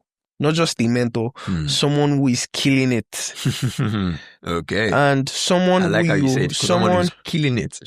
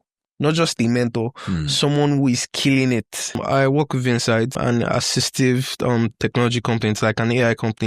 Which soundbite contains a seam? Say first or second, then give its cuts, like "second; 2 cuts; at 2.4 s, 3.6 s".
second; 2 cuts; at 3.4 s, 4.6 s